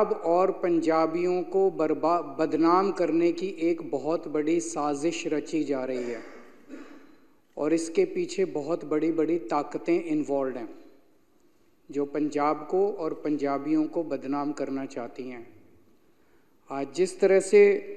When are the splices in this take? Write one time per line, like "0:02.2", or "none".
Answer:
none